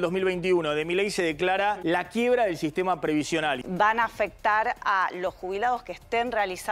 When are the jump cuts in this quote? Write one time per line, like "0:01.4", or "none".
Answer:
0:01.8
0:03.6